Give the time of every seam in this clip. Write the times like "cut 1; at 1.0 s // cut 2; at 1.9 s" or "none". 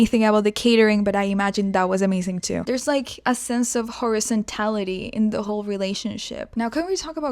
cut 1; at 2.8 s // cut 2; at 6.4 s